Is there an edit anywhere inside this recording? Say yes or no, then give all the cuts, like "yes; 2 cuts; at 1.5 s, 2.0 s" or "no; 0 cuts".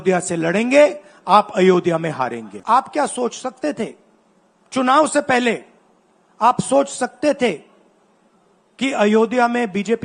yes; 1 cut; at 2.5 s